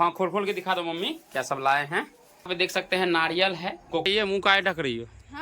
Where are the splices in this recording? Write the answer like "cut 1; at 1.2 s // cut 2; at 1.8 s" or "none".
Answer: cut 1; at 2.5 s // cut 2; at 4.1 s